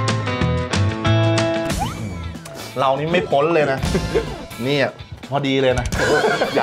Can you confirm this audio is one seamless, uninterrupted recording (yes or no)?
no